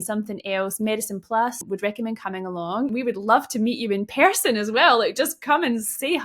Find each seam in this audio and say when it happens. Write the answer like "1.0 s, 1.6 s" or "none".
1.6 s, 2.9 s